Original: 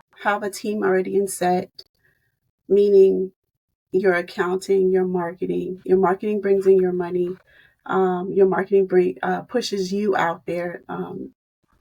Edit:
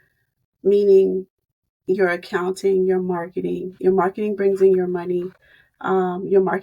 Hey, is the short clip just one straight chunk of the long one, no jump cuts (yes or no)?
yes